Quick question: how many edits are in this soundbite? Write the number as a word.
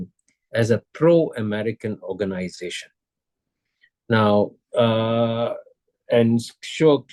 zero